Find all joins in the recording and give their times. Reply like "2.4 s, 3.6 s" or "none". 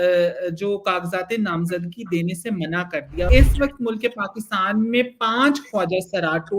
3.3 s